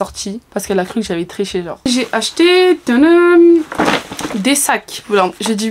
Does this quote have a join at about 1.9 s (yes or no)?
yes